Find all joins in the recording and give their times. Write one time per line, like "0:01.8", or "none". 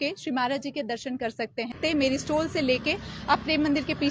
0:01.8